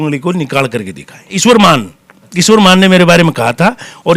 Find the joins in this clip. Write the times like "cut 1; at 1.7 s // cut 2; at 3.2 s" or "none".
cut 1; at 1.4 s